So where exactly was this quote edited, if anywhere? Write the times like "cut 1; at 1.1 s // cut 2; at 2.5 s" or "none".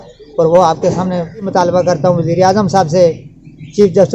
cut 1; at 1.5 s

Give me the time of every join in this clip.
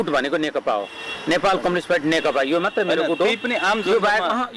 none

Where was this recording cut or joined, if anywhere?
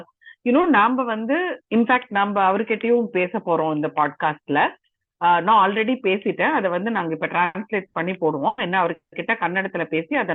none

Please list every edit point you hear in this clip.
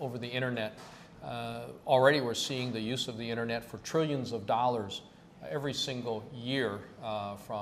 none

